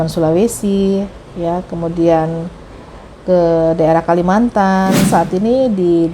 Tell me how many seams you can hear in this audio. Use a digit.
1